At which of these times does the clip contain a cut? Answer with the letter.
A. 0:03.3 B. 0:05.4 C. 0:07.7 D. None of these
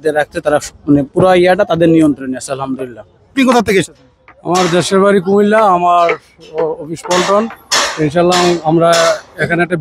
A